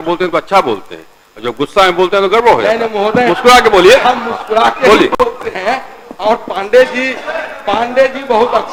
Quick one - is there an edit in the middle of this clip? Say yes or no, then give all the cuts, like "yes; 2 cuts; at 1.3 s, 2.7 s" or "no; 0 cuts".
no; 0 cuts